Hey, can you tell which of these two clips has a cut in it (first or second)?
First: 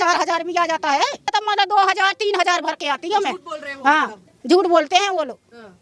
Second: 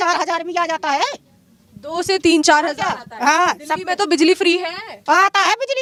first